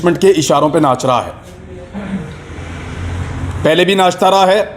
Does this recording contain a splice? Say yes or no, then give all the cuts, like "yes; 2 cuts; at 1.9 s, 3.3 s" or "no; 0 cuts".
no; 0 cuts